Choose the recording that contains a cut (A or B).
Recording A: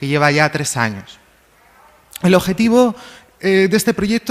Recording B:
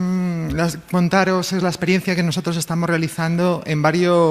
B